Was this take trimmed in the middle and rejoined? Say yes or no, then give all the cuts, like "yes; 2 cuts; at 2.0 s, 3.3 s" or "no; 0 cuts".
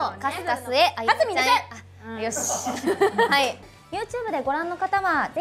yes; 1 cut; at 3.6 s